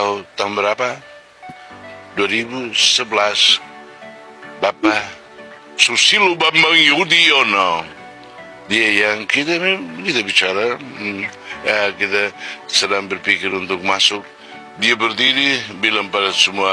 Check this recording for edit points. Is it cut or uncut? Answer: uncut